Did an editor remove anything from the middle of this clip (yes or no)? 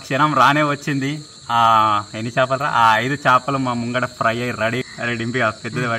no